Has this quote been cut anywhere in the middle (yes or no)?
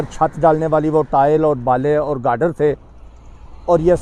no